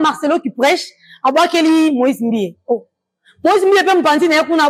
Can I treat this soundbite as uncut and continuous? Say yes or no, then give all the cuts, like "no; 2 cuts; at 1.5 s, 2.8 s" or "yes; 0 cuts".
yes; 0 cuts